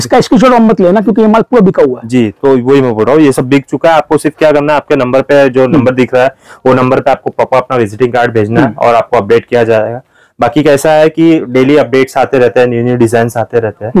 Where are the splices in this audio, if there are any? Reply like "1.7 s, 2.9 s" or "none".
none